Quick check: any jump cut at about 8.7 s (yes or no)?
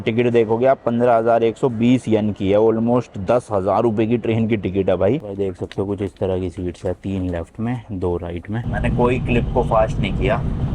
yes